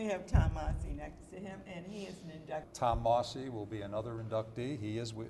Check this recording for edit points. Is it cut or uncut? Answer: uncut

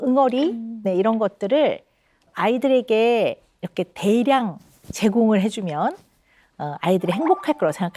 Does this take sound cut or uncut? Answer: uncut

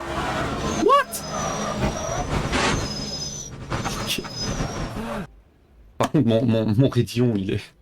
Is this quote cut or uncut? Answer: cut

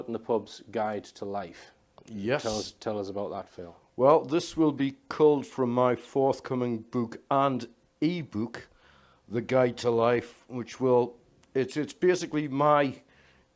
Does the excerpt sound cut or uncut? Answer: uncut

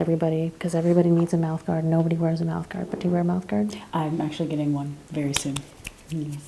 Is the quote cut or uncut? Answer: uncut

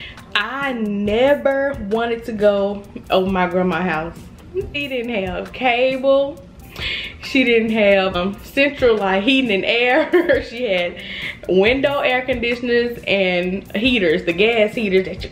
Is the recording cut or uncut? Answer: cut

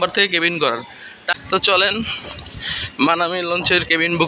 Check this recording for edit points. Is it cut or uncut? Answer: cut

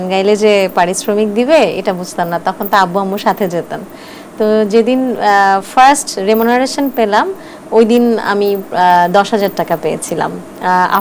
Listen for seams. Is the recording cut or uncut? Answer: uncut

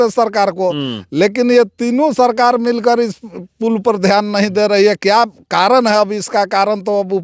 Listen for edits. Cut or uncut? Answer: uncut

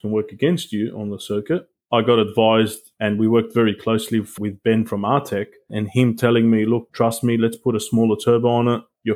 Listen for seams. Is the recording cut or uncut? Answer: cut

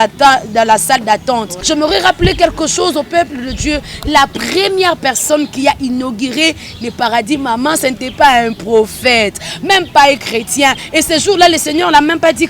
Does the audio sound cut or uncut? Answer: cut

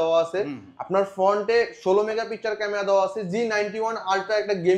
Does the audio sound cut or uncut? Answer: uncut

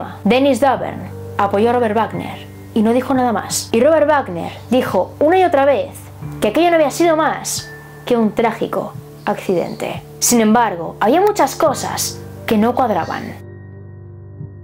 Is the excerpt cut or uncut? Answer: cut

